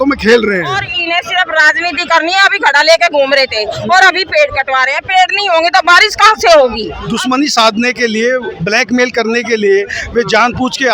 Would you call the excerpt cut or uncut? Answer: cut